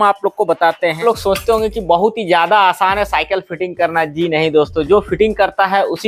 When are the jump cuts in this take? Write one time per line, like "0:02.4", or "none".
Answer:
0:01.0

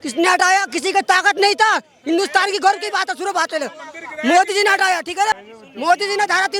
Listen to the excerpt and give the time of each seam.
0:05.4

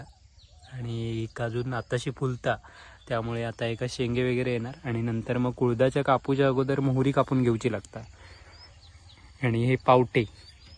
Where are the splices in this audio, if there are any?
none

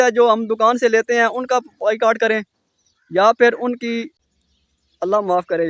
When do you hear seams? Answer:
0:04.2

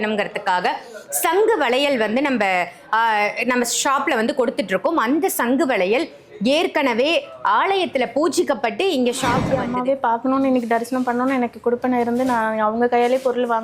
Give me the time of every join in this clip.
0:09.5

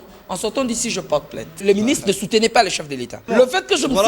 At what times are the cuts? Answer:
0:01.6
0:03.3

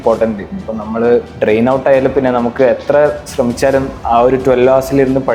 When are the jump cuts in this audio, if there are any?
0:01.3

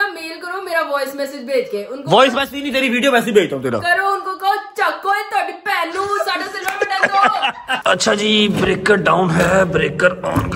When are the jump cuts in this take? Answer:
0:07.8

